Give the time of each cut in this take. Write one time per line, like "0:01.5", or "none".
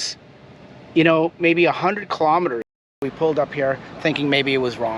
0:02.9